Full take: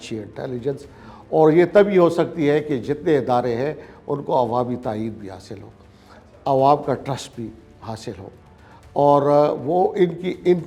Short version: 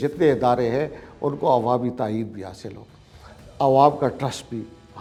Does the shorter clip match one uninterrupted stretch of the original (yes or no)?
yes